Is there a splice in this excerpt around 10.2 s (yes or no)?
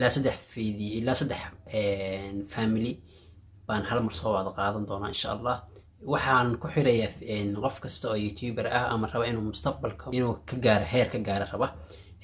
yes